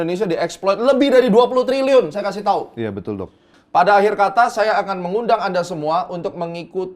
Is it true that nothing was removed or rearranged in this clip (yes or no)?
no